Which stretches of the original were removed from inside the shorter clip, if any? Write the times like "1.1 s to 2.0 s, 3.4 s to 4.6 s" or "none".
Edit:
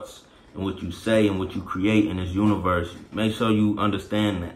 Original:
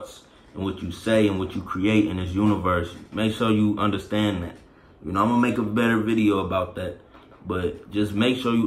none